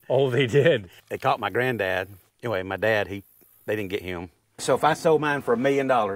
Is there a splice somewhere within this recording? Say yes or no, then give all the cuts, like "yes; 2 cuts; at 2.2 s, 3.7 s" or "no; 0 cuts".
yes; 3 cuts; at 1.0 s, 2.2 s, 4.6 s